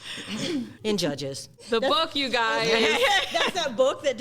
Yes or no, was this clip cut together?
yes